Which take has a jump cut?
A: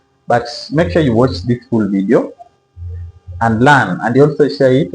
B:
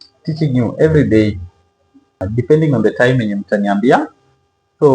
B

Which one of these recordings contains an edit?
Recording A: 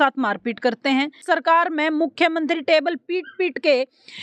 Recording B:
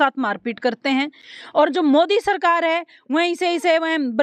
A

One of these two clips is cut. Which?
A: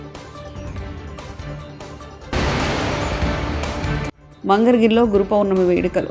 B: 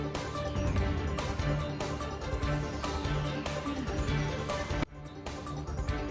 A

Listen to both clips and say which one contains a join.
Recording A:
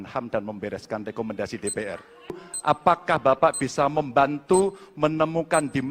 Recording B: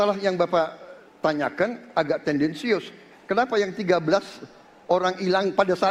A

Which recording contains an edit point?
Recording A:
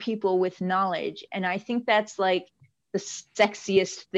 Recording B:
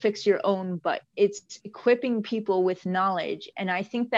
B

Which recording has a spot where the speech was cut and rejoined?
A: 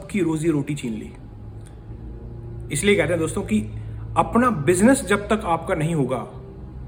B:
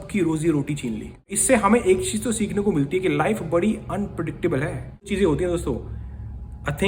B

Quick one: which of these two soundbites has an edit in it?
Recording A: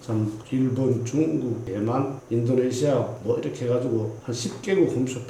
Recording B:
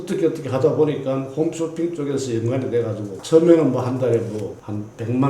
B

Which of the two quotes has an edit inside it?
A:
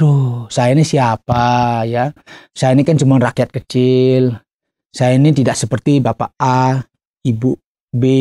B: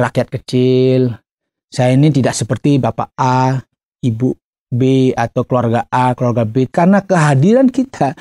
B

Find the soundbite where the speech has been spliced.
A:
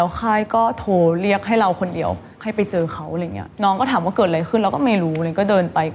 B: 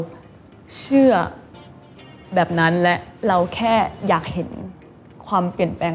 A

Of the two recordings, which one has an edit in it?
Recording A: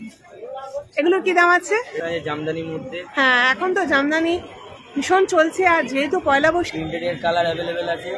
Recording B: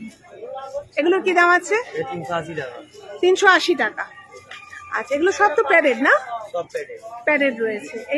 A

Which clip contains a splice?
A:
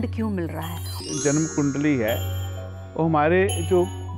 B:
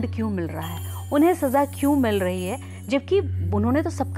A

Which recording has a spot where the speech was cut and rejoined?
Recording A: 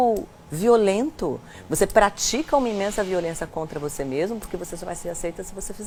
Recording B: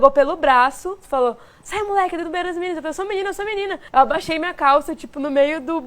B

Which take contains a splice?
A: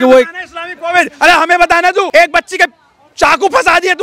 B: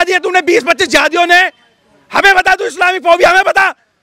A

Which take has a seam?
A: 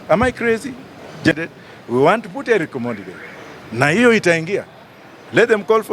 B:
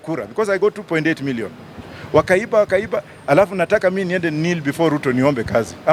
A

